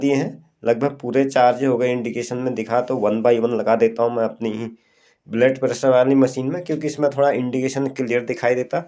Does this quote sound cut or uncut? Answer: uncut